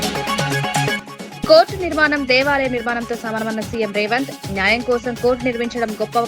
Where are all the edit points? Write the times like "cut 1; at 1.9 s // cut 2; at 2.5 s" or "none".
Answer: cut 1; at 0.9 s